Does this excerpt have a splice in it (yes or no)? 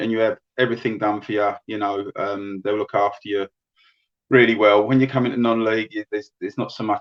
no